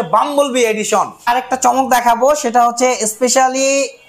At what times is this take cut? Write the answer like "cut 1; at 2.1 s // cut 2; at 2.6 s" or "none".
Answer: cut 1; at 1.2 s